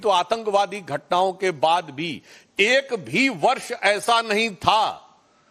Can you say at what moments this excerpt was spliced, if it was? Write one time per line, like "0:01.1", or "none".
none